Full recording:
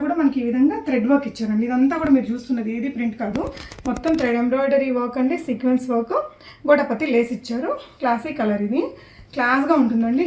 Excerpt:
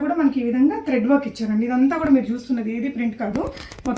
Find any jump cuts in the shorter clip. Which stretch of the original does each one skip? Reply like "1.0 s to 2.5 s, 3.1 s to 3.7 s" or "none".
none